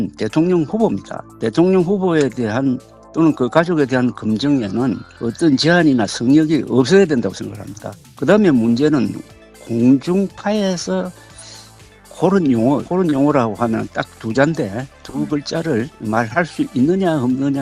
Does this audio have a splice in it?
no; 0 cuts

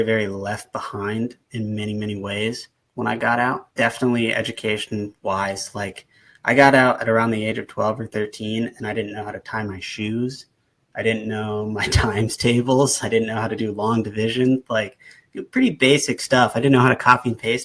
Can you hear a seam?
yes; 1 cut; at 3.7 s

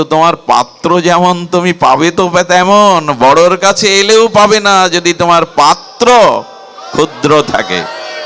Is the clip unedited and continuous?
yes; 0 cuts

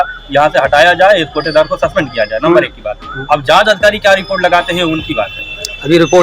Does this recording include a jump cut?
no; 0 cuts

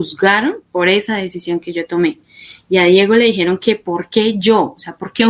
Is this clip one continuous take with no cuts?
yes; 0 cuts

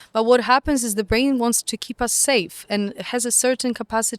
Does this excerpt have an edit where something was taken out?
no; 0 cuts

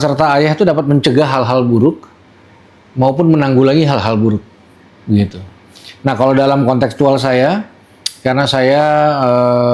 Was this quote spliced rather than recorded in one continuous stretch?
no; 0 cuts

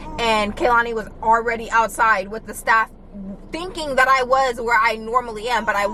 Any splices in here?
no; 0 cuts

